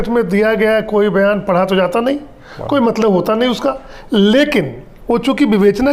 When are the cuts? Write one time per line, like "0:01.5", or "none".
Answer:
none